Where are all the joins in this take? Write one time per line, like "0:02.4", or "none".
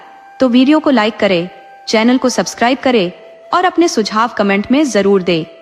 none